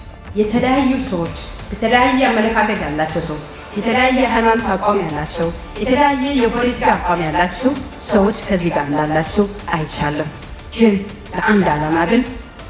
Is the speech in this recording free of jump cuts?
yes; 0 cuts

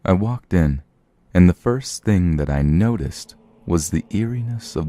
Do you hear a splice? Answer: yes; 1 cut; at 2.9 s

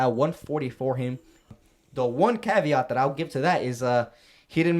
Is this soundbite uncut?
no; 1 cut; at 1.5 s

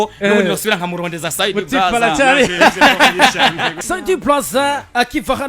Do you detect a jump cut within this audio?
yes; 1 cut; at 3.8 s

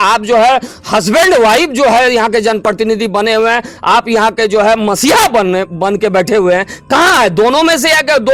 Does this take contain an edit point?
no; 0 cuts

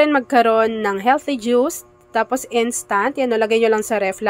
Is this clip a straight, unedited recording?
yes; 0 cuts

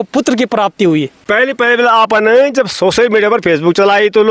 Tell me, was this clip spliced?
yes; 1 cut; at 1.2 s

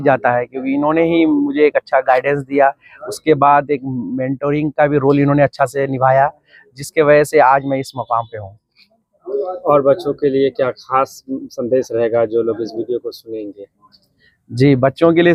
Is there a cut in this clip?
no; 0 cuts

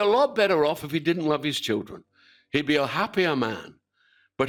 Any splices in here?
no; 0 cuts

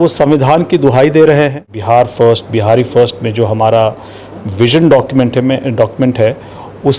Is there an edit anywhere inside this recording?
yes; 1 cut; at 1.7 s

